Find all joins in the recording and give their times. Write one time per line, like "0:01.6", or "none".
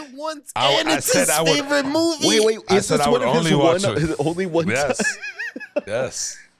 none